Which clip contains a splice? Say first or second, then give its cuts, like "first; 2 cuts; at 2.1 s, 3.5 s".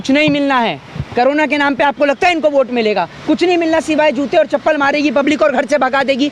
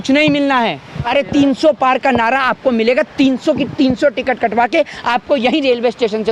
second; 1 cut; at 0.9 s